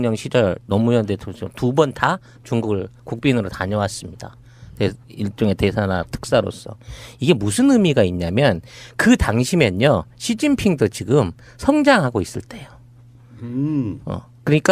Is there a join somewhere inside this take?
yes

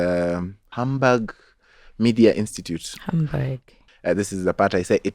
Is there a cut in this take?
yes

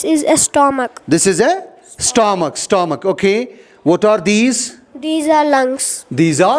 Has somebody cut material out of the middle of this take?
no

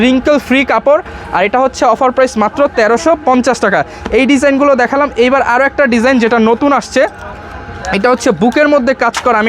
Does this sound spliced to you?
no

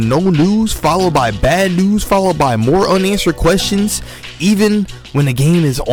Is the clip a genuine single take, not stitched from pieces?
yes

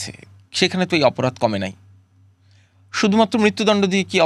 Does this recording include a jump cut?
no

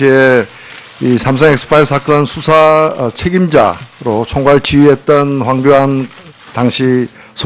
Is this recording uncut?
no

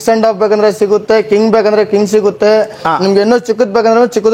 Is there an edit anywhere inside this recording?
no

